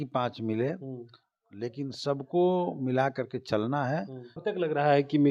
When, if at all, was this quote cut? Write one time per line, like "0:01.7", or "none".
0:04.4